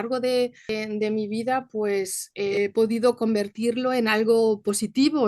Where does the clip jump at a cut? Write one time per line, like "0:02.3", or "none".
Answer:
0:00.7
0:02.5